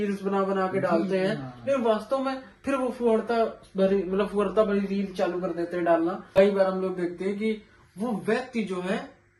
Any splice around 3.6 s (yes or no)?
no